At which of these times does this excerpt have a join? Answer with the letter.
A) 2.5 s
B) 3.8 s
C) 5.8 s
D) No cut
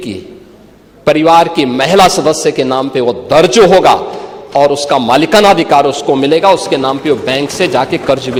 D